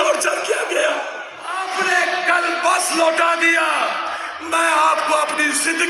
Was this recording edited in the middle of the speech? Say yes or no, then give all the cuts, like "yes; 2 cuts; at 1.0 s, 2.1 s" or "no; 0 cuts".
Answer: yes; 1 cut; at 1.6 s